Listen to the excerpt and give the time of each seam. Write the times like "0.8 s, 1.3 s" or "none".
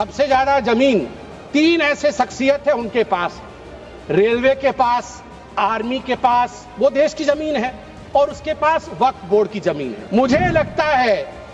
9.9 s